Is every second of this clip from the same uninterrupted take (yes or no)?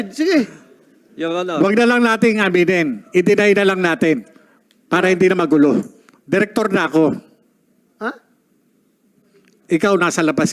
yes